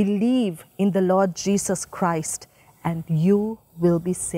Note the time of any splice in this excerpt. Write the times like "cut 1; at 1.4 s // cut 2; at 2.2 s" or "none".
none